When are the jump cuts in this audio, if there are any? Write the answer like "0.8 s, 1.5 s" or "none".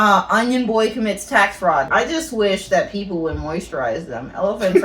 1.9 s

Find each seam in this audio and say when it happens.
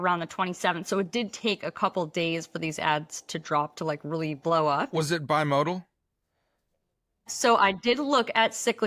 none

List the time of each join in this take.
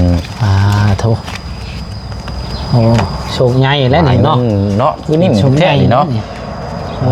none

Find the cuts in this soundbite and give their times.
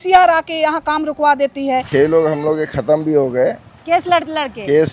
1.9 s

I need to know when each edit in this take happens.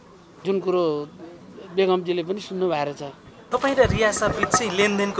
3.4 s

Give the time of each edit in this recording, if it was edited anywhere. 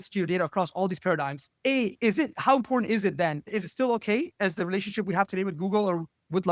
1.4 s

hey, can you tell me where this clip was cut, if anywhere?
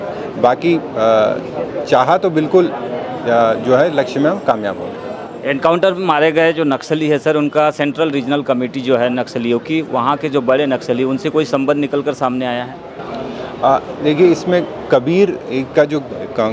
none

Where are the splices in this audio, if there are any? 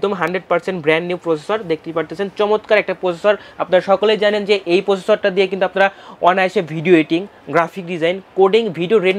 none

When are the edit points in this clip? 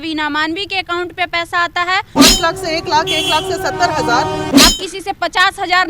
2.1 s, 4.5 s

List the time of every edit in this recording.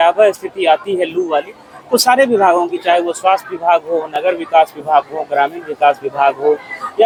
none

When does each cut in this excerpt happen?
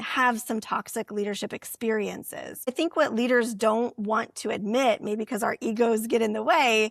2.7 s

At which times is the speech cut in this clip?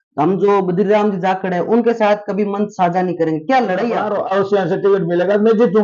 4.6 s

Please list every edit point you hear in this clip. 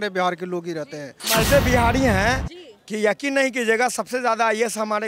1.2 s

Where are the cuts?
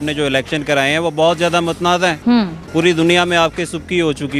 none

